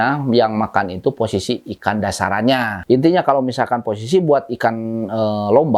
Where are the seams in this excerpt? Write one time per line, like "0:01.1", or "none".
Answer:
0:02.7

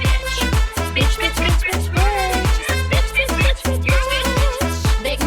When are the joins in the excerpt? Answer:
none

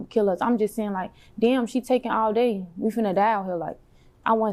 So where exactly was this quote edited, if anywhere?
none

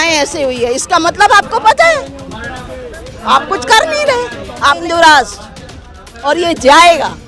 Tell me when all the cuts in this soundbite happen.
0:04.8

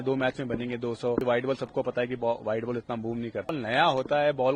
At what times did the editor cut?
0:01.2
0:03.5

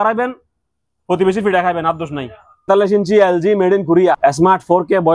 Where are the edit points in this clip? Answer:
0:02.7
0:04.2

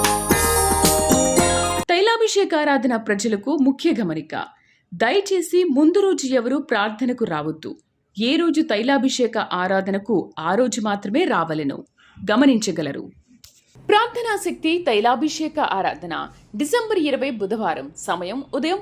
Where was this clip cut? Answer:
0:01.7

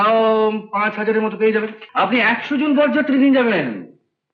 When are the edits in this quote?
0:01.8

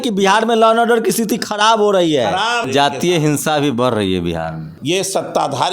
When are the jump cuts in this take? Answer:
0:02.6
0:04.7

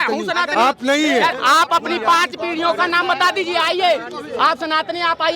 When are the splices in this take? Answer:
0:01.3

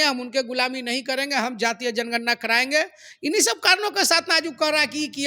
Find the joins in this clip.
none

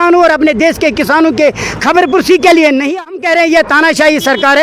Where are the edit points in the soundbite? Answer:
0:03.0

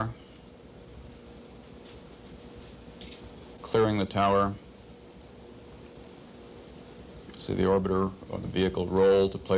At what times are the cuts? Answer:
none

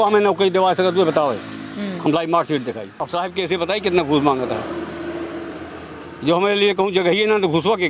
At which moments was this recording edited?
0:02.9

